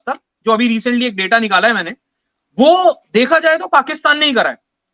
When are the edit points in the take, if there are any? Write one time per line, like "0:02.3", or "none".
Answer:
none